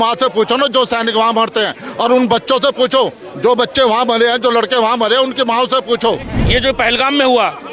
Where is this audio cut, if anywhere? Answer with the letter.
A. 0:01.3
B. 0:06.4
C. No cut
B